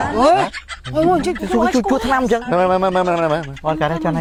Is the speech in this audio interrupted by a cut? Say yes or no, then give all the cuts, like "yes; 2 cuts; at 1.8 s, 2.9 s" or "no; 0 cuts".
no; 0 cuts